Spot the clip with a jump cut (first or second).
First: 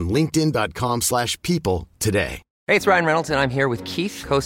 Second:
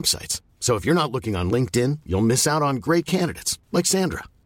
first